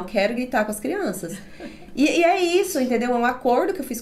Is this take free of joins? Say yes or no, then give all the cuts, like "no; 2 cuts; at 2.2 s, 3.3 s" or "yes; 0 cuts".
yes; 0 cuts